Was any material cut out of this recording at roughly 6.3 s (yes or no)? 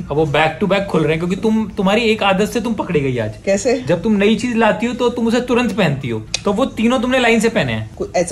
yes